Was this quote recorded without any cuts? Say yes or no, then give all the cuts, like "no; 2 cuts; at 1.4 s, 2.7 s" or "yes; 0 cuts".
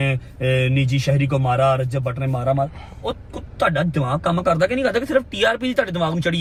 yes; 0 cuts